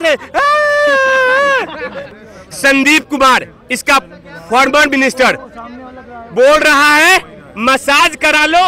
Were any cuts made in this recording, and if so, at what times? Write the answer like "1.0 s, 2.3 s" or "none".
2.1 s